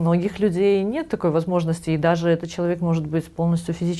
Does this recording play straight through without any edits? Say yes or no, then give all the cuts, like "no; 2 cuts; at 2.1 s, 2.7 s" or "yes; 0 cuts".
yes; 0 cuts